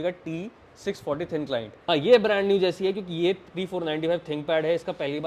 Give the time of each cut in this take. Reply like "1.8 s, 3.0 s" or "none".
1.7 s